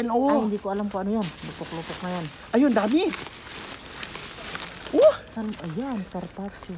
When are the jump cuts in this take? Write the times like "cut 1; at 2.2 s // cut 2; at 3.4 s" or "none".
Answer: none